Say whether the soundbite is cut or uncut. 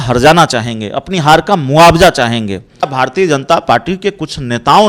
cut